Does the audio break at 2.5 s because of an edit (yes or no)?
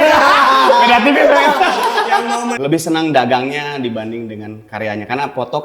yes